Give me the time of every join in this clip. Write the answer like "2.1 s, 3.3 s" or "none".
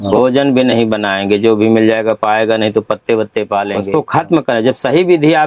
3.8 s